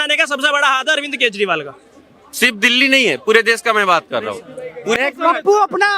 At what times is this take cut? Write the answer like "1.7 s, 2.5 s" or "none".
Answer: 5.0 s